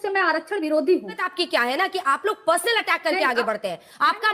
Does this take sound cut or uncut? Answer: cut